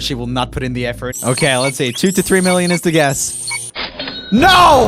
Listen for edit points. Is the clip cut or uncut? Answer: cut